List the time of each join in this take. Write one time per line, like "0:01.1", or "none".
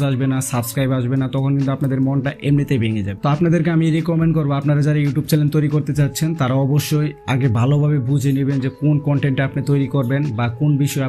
0:03.1